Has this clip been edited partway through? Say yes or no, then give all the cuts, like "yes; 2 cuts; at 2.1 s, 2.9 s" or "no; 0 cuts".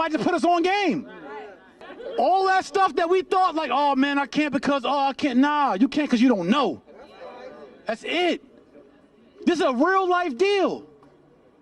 yes; 1 cut; at 1.8 s